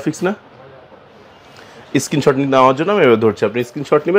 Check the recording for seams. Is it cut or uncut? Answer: uncut